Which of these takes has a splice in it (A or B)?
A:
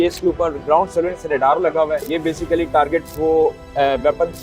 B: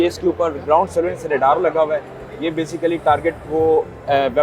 A